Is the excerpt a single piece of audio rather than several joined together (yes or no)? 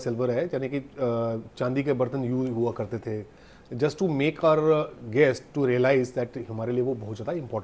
yes